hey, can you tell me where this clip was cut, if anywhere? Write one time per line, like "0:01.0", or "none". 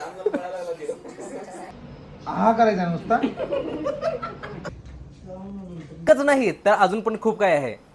0:01.7
0:06.0